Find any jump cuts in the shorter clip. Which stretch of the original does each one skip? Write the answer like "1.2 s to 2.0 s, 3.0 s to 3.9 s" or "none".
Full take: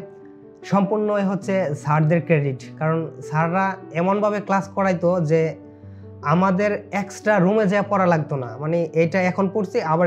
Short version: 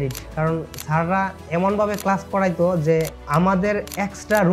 5.6 s to 6.1 s